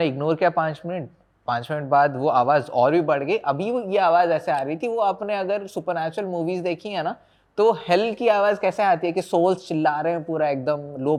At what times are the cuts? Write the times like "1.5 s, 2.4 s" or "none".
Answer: none